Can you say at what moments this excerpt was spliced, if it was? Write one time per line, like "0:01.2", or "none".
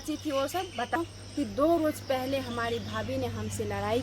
0:01.0